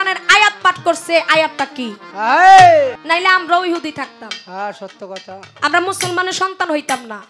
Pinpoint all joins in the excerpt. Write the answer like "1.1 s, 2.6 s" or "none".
3.0 s